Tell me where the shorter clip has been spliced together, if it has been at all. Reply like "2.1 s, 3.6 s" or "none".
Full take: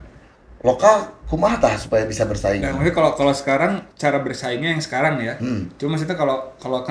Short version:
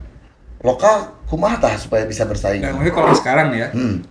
3.0 s

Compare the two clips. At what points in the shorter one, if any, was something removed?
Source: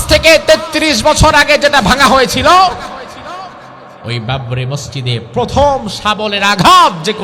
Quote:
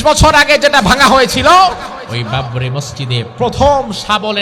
2.1 s

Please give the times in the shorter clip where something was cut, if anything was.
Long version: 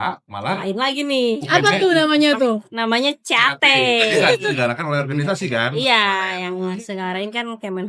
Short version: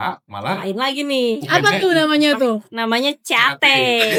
none

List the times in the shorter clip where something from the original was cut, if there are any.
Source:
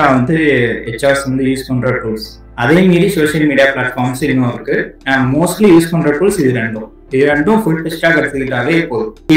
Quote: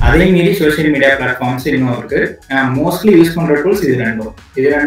none

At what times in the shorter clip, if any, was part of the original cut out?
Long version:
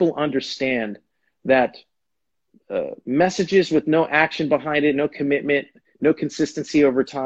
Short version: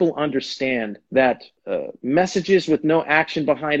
1.0 s, 1.5 s

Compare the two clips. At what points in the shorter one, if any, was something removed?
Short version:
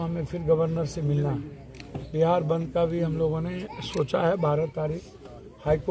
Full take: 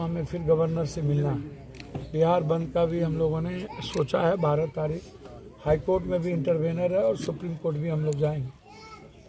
none

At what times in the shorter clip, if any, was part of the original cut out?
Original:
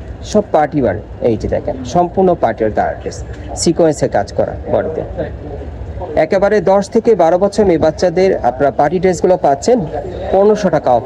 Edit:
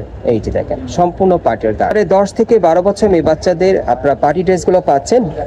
1.9 s

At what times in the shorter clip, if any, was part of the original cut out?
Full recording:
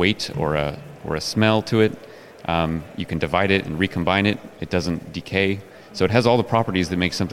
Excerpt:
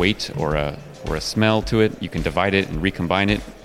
2.1 s

